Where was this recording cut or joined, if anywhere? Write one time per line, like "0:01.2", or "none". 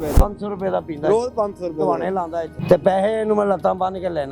0:02.5

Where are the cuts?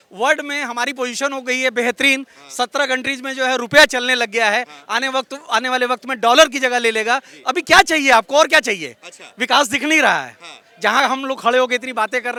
none

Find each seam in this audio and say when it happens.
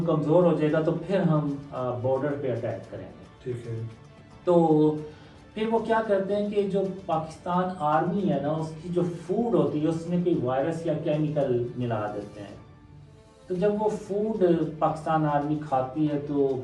none

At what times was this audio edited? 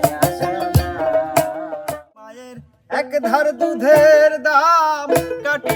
0:02.2

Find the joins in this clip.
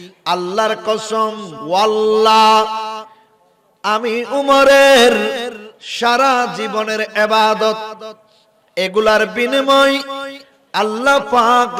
0:01.5

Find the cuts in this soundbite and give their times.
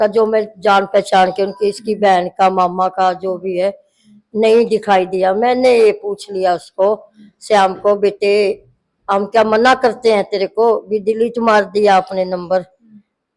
none

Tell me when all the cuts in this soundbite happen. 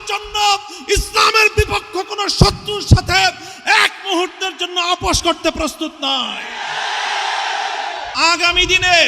0:08.1

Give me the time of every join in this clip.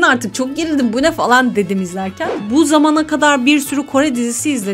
0:02.4

